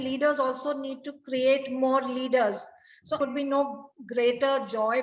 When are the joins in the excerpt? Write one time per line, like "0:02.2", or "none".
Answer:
0:03.2

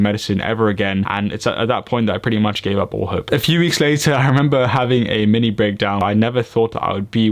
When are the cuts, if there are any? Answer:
0:06.0

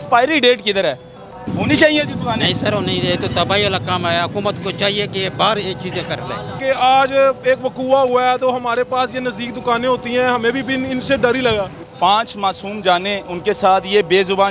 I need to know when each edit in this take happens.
0:01.4
0:06.6
0:11.8

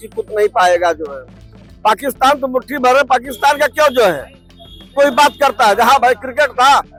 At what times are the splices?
none

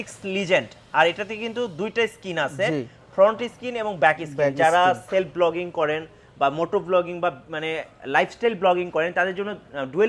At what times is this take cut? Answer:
none

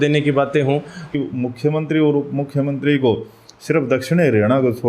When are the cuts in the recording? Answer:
0:01.1

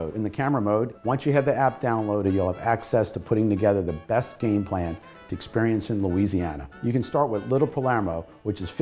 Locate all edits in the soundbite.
0:00.9

